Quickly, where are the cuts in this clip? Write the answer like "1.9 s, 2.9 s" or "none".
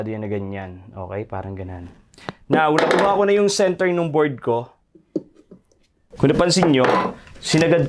6.0 s